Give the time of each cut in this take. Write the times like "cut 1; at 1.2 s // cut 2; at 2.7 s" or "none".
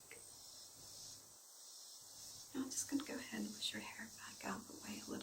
none